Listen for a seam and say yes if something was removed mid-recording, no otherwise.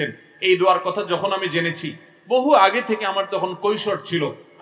no